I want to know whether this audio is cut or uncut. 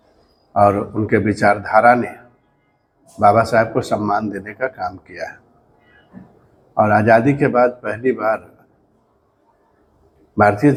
uncut